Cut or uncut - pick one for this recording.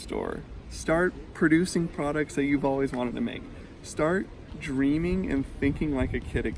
uncut